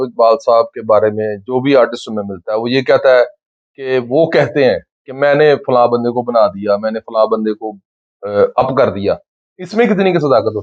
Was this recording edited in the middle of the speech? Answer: no; 0 cuts

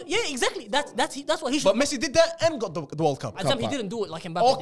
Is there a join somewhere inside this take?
yes; 1 cut; at 3.3 s

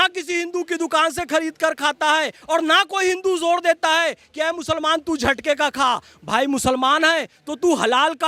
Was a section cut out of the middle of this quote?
no; 0 cuts

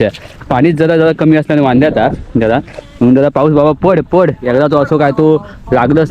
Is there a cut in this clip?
no; 0 cuts

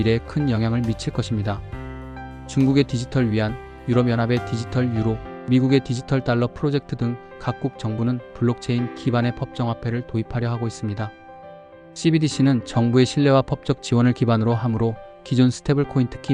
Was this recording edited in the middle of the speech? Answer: no; 0 cuts

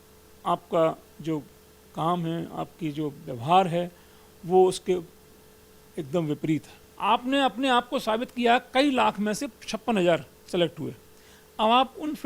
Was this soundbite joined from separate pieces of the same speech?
yes; 1 cut; at 6.9 s

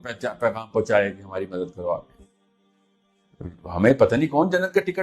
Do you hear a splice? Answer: yes; 1 cut; at 2.1 s

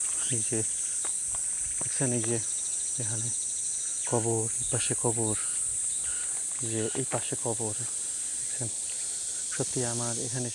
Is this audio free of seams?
yes; 0 cuts

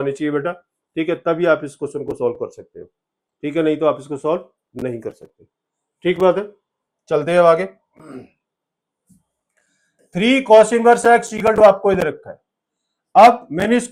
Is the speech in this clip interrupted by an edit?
no; 0 cuts

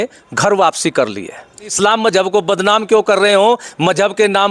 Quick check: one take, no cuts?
no; 1 cut; at 1.7 s

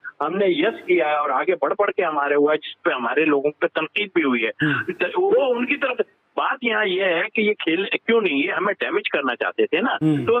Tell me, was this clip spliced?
no; 0 cuts

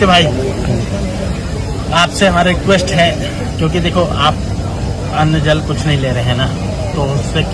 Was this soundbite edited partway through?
no; 0 cuts

